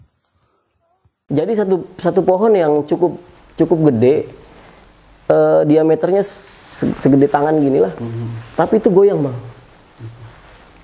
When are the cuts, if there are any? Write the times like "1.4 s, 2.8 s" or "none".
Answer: 1.1 s

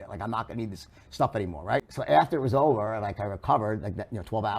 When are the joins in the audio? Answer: 1.9 s

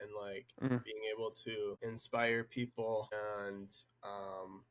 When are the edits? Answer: 1.8 s, 3.1 s

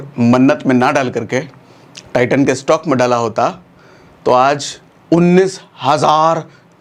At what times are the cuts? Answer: none

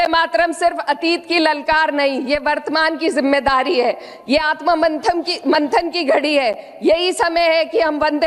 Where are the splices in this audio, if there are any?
none

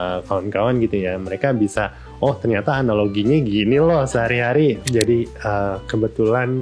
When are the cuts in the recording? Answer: 4.8 s

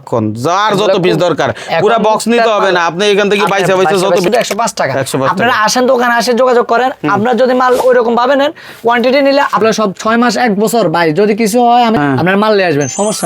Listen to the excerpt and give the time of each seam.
4.3 s, 9.6 s, 12.0 s

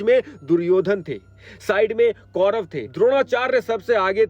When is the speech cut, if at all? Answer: none

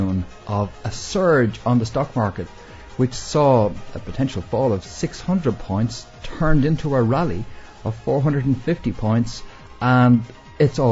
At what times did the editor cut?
none

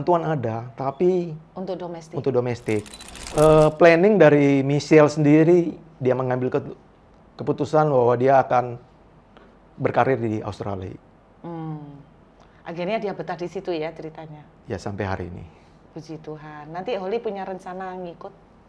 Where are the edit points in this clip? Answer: 3.2 s

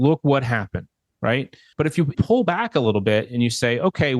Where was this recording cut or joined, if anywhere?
none

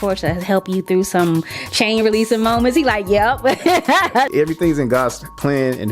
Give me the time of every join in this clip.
4.2 s

